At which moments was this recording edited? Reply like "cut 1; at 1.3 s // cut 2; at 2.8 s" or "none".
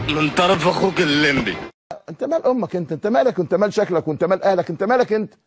cut 1; at 1.9 s